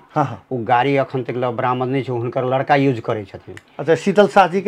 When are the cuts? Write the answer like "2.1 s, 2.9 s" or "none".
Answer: none